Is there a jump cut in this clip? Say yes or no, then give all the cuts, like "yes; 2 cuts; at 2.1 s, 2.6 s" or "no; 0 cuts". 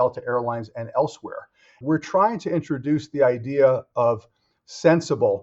yes; 1 cut; at 1.8 s